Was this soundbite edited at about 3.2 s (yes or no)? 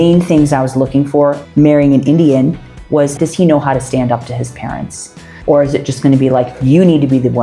yes